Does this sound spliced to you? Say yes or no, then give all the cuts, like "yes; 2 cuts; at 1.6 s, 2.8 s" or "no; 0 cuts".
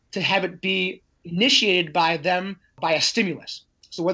yes; 1 cut; at 2.7 s